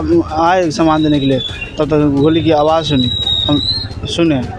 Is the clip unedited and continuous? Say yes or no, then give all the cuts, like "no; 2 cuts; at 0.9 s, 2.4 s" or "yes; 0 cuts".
yes; 0 cuts